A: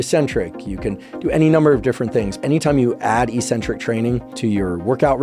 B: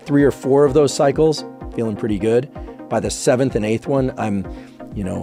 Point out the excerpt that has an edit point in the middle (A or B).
A